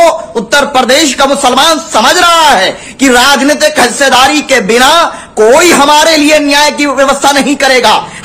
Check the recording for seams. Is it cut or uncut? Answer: uncut